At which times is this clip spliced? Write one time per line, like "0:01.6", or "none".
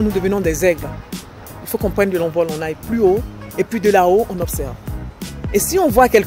none